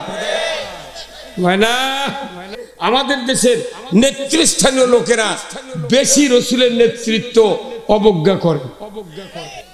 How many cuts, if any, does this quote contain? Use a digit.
1